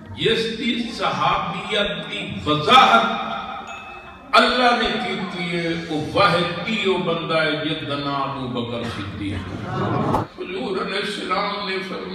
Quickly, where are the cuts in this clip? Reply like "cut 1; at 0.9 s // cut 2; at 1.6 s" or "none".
cut 1; at 10.2 s